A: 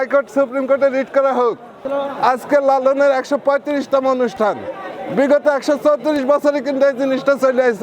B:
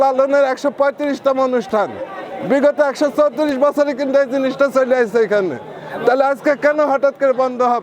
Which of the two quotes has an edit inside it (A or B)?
A